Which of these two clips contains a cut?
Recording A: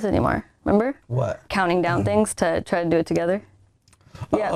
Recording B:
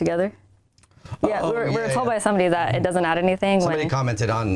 A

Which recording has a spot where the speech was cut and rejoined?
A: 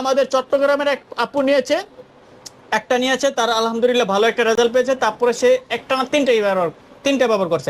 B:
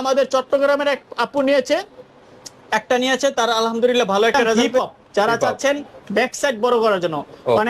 B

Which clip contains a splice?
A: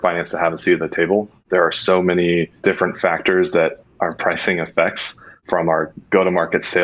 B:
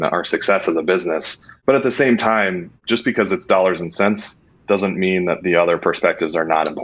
A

